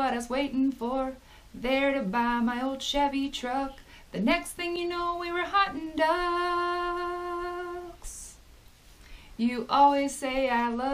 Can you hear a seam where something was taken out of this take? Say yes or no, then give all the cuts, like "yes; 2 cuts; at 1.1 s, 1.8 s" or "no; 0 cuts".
no; 0 cuts